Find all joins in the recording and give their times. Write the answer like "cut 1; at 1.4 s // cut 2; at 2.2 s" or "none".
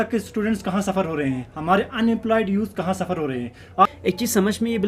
cut 1; at 3.9 s